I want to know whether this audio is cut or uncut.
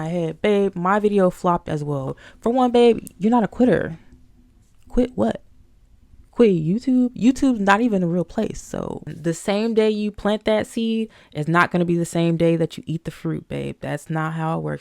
cut